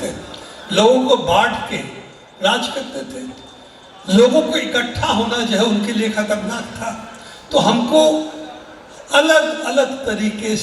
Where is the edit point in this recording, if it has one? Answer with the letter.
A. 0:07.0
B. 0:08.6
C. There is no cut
C